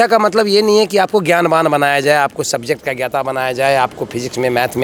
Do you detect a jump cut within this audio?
no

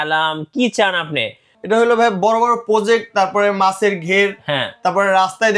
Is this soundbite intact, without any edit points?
no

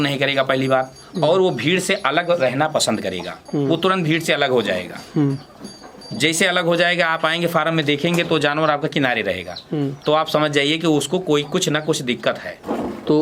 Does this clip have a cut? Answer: no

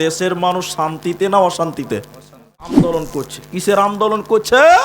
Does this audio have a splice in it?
yes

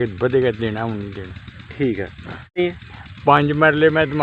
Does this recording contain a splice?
yes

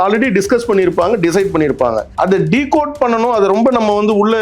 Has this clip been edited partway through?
yes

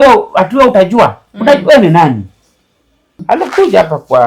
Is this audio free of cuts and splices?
no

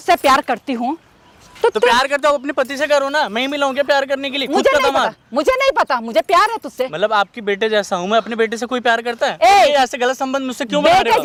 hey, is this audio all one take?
yes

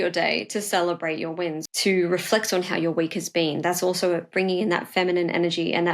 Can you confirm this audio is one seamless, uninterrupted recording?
no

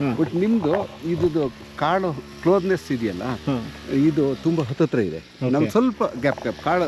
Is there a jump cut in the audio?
no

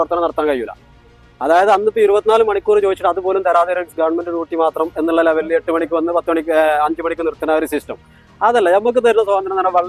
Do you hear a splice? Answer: no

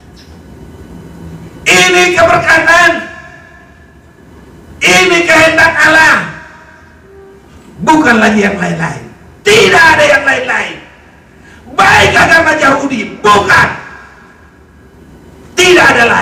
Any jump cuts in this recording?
no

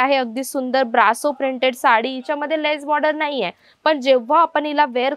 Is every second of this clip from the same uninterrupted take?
yes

